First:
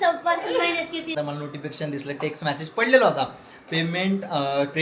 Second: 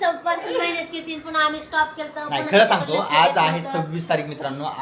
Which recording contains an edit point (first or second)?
first